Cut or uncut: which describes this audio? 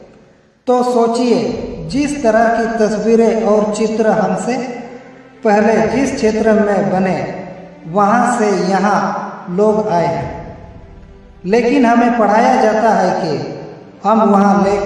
uncut